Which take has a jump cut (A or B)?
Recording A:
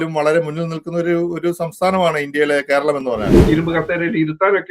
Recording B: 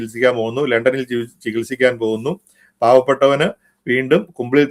A